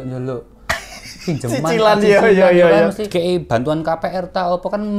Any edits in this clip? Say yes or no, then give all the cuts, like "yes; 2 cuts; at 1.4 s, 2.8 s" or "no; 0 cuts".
yes; 1 cut; at 3.0 s